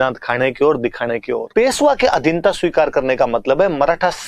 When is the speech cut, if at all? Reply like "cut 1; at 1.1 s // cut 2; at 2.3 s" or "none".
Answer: cut 1; at 1.5 s